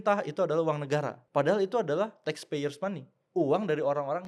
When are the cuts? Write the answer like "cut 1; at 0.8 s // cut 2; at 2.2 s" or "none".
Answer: cut 1; at 1.2 s // cut 2; at 3.1 s